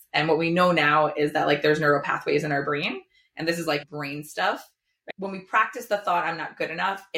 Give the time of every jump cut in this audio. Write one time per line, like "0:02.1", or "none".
0:03.9
0:05.1